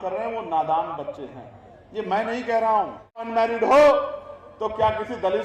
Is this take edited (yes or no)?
yes